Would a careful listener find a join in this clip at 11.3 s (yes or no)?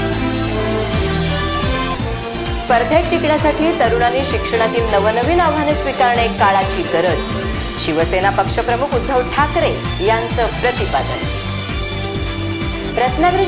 no